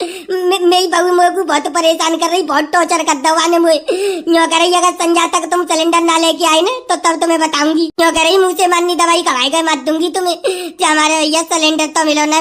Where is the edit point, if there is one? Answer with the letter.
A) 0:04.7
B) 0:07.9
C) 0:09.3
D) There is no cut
B